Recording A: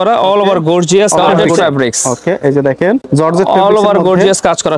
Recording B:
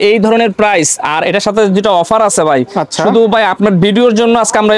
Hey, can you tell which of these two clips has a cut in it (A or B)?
A